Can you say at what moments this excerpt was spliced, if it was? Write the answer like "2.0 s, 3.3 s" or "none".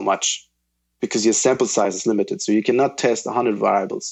none